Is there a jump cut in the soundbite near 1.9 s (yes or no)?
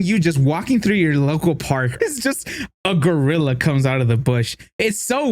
yes